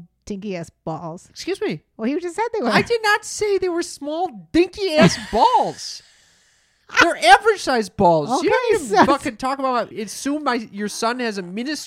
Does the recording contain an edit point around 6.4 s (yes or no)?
no